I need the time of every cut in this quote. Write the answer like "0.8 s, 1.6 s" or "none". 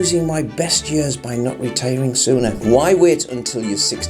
2.5 s